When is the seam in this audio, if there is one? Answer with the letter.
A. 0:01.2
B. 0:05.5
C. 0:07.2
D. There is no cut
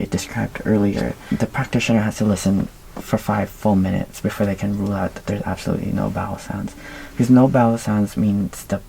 A